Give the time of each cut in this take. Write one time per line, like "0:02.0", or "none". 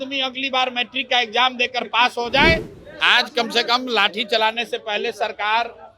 0:02.8